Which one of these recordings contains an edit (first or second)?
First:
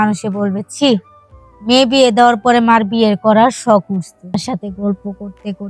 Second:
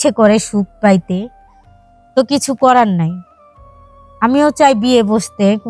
first